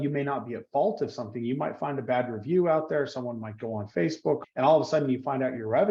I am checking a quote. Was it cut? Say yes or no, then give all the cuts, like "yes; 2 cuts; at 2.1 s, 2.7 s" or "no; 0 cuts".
yes; 1 cut; at 4.4 s